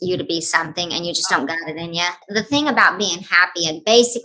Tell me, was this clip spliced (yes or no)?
yes